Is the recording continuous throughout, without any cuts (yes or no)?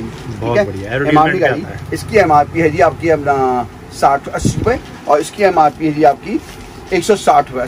yes